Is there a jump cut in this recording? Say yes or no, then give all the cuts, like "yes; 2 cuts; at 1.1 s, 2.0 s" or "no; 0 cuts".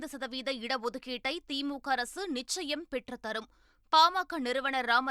no; 0 cuts